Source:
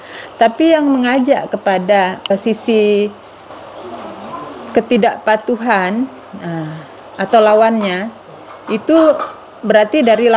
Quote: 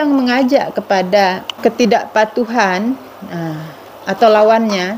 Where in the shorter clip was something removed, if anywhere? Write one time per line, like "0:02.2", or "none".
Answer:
0:01.4

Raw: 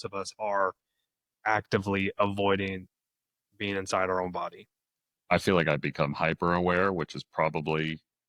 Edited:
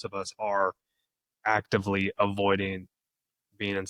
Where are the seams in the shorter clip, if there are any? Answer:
none

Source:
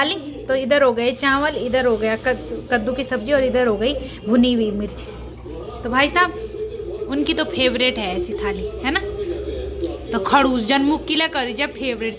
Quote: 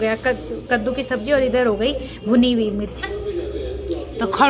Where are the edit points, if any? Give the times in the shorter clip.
0:03.1

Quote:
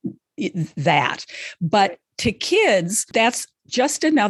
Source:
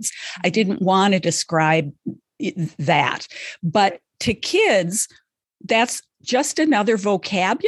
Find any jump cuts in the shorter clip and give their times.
0:03.0

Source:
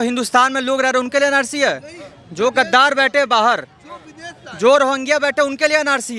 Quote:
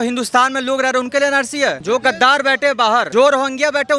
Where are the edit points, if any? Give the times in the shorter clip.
0:01.8
0:03.1

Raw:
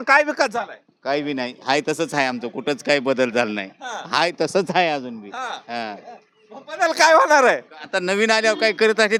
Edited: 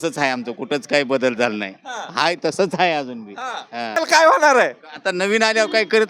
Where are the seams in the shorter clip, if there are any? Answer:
0:04.0

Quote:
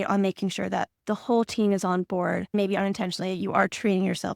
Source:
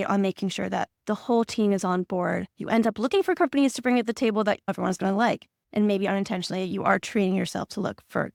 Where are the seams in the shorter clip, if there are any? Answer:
0:02.5

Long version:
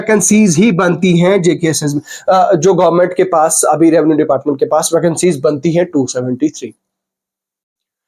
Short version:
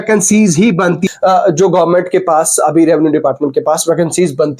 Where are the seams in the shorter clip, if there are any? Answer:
0:01.0

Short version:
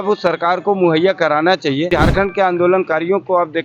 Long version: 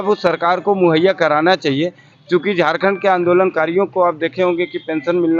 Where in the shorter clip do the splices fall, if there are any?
0:01.9

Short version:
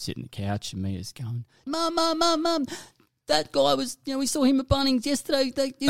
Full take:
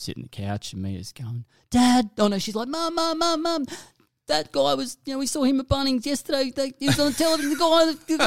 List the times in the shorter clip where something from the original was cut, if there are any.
0:01.6

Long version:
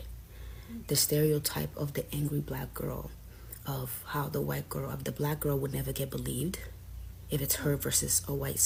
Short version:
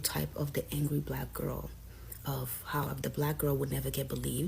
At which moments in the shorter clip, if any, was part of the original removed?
0:02.9

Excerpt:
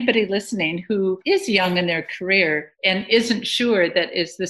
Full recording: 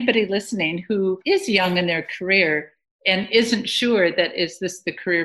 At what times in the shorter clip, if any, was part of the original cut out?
0:02.7

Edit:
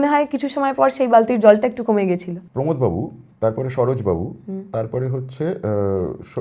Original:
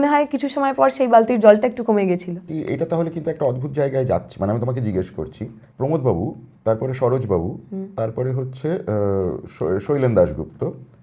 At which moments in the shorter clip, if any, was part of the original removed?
0:02.4

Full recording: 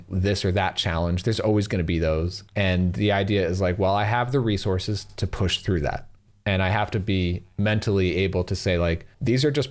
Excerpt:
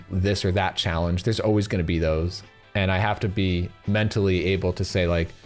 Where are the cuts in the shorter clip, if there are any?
0:02.4

